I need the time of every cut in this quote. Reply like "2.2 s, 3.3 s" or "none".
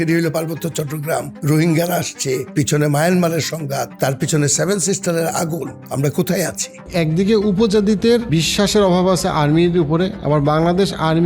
1.3 s, 2.5 s, 3.9 s, 5.8 s, 6.9 s, 8.3 s